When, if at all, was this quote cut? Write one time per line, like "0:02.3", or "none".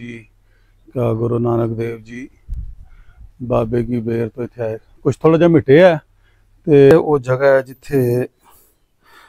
0:06.9